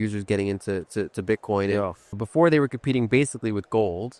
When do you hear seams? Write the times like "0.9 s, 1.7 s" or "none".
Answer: 2.2 s